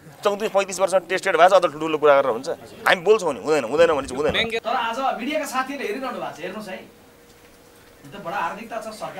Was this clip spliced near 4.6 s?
yes; 1 cut; at 4.6 s

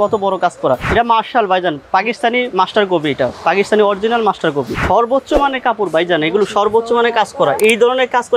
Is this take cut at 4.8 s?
yes; 2 cuts; at 0.9 s, 4.8 s

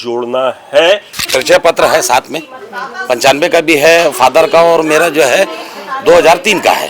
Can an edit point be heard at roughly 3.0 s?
no; 1 cut; at 1.1 s

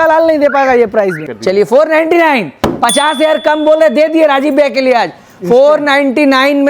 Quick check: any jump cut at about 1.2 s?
yes; 1 cut; at 1.2 s

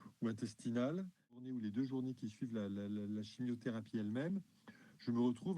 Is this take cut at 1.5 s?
yes; 1 cut; at 1.5 s

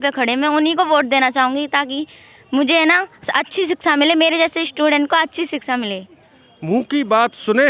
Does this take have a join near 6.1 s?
no; 0 cuts

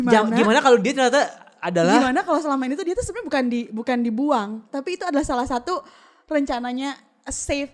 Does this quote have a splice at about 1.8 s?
no; 0 cuts

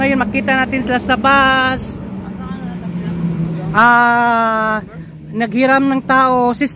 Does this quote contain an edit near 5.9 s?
no; 0 cuts

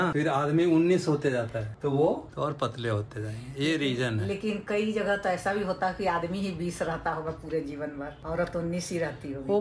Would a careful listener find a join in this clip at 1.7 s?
yes; 2 cuts; at 1.7 s, 2.3 s

